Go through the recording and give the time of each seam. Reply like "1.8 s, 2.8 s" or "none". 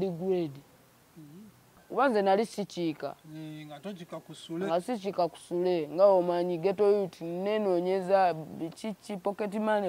1.8 s